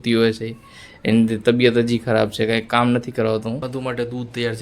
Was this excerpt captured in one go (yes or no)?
no